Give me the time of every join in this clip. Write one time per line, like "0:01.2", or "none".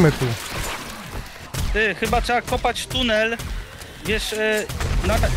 0:01.4